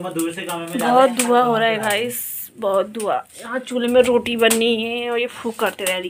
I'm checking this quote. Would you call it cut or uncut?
uncut